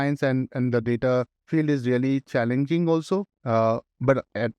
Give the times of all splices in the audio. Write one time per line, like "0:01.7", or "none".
0:01.4
0:03.3